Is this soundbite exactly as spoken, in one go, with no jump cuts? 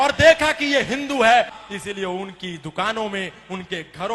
no; 1 cut; at 1.6 s

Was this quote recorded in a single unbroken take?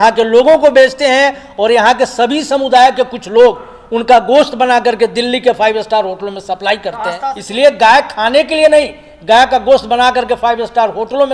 no; 1 cut; at 7.3 s

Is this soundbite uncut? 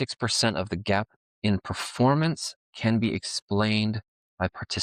no; 1 cut; at 1.2 s

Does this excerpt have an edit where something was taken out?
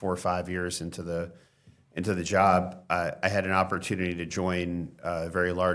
no; 0 cuts

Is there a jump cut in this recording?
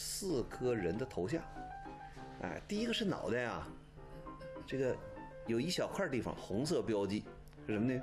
no; 0 cuts

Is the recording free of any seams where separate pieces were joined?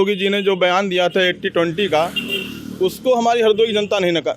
yes; 0 cuts

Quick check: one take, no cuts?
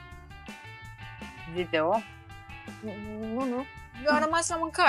yes; 0 cuts

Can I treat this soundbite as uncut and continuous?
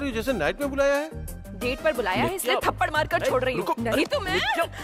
yes; 0 cuts

